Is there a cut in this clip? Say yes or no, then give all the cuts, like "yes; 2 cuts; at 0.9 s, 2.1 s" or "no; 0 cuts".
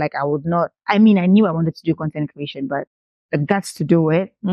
no; 0 cuts